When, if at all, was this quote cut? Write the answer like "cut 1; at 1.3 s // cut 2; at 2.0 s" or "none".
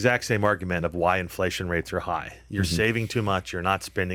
none